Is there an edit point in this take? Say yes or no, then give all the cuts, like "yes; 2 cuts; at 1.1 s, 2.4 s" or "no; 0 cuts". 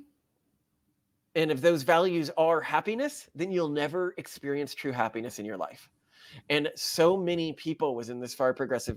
no; 0 cuts